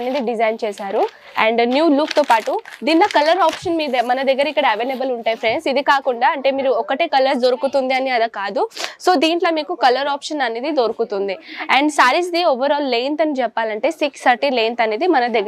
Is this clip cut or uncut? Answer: uncut